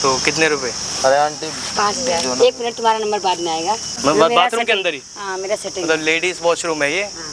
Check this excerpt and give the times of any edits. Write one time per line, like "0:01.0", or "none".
0:03.9